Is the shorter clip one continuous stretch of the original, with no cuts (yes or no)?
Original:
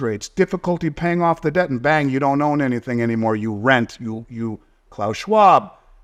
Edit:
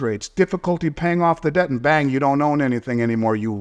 yes